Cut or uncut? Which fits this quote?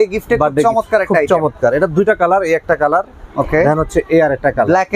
uncut